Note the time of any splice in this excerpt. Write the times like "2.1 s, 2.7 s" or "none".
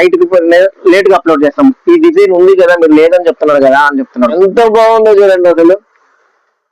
4.4 s